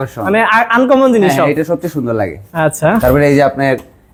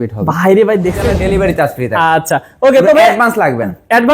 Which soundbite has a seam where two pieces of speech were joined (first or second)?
second